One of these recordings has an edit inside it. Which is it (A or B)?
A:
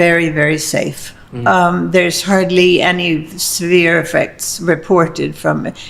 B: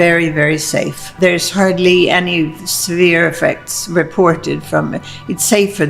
B